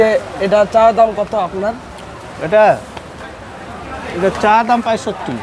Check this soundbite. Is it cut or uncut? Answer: uncut